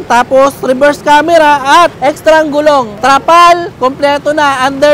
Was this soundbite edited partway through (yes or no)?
yes